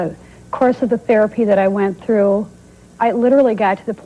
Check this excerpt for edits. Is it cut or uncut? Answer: cut